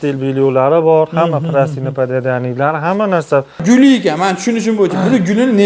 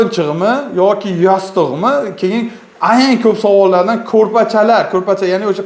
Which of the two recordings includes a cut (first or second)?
first